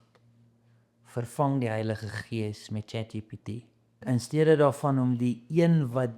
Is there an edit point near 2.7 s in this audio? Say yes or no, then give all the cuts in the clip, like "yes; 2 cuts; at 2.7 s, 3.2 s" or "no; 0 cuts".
no; 1 cut; at 4.0 s